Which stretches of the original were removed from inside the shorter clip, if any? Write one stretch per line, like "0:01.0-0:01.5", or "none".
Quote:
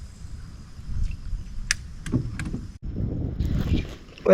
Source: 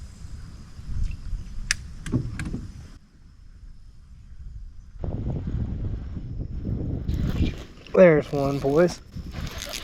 0:02.8-0:06.5